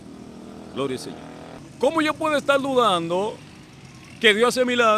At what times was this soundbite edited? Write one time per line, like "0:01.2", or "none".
0:01.6